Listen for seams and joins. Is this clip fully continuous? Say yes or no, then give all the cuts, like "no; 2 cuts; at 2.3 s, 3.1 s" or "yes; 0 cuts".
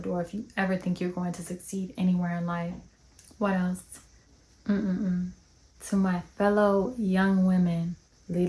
yes; 0 cuts